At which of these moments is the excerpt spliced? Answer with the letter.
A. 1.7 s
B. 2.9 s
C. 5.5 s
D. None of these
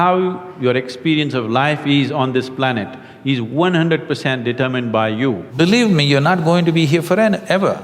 C